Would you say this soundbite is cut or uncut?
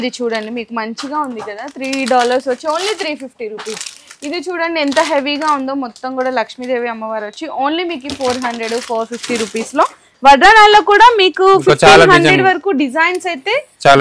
uncut